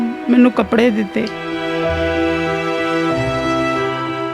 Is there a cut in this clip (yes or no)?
yes